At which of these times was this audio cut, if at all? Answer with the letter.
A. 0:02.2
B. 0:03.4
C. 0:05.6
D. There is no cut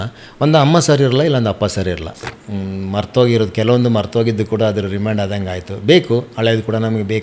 A